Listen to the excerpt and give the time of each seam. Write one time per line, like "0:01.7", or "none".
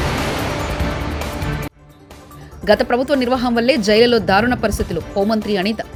none